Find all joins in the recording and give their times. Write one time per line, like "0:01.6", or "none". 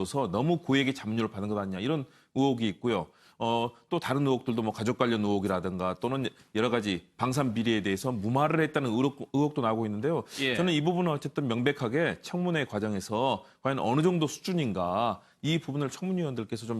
0:07.4